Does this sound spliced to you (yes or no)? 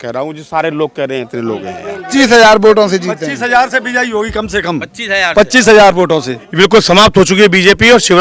yes